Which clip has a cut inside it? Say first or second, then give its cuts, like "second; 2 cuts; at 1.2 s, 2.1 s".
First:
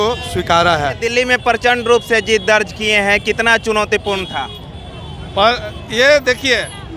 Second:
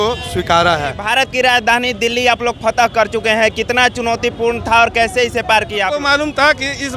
second; 2 cuts; at 1.0 s, 6.0 s